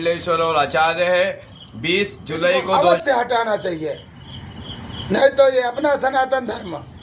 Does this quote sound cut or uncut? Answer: cut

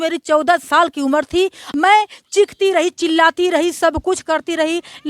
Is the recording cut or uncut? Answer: cut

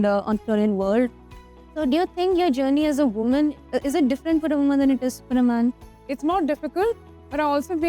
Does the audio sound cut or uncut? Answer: cut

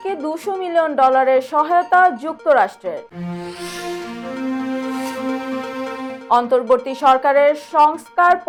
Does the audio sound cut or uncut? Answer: uncut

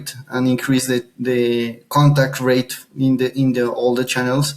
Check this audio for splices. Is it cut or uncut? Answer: uncut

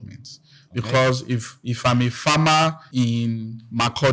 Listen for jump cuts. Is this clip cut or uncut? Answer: cut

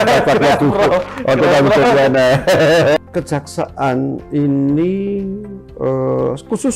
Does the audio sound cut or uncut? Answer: cut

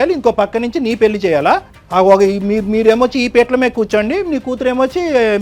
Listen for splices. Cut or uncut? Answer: cut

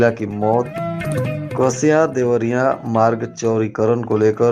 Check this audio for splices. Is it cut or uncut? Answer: uncut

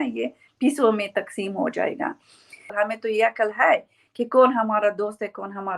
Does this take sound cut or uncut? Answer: cut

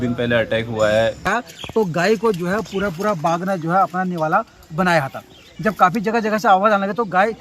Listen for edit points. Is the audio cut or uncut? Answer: cut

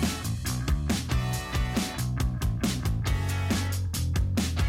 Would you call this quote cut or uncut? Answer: cut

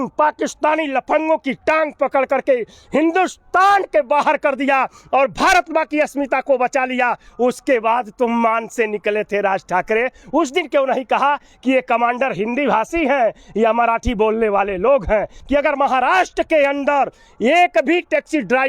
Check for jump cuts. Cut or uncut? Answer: cut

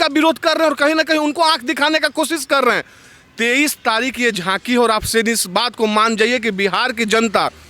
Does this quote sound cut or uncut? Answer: uncut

